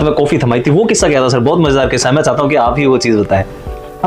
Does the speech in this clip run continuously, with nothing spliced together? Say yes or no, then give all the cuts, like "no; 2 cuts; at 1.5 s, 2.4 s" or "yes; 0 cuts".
yes; 0 cuts